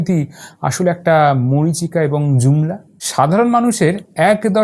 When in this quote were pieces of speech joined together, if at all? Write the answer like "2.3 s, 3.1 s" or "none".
3.0 s